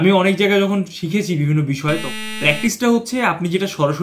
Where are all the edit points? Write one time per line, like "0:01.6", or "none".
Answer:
0:02.1